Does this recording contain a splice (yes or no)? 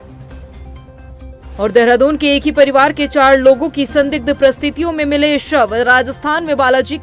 no